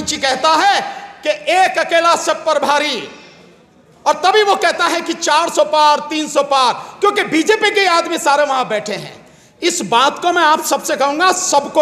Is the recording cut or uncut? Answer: uncut